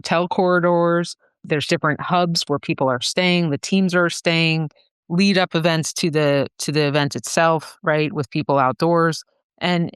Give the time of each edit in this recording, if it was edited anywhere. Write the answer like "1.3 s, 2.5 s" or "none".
1.4 s

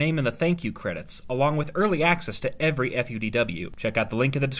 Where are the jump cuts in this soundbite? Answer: 3.7 s

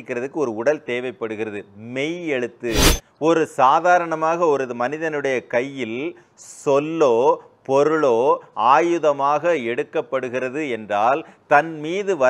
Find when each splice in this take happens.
2.9 s

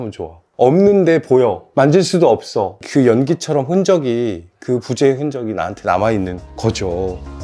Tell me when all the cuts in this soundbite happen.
2.8 s, 6.5 s

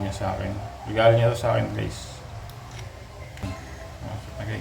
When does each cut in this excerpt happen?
3.4 s

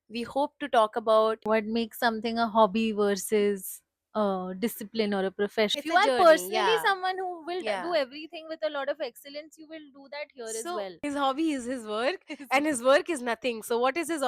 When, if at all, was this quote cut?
1.4 s, 5.8 s, 11.0 s

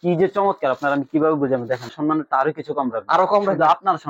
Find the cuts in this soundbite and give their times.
1.9 s

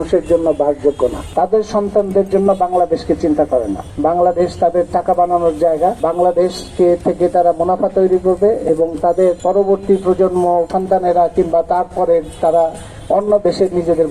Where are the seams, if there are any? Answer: 1.2 s, 3.8 s, 6.0 s, 9.4 s, 10.7 s

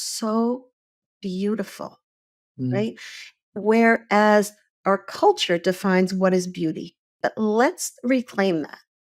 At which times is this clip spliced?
7.1 s

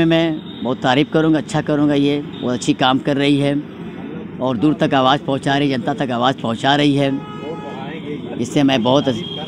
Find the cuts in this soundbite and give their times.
none

